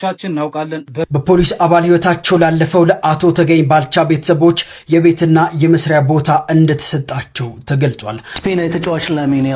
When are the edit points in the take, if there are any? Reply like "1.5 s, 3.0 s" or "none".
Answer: 1.1 s, 8.3 s